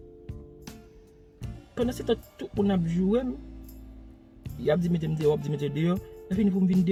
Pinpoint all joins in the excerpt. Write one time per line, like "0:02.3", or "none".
none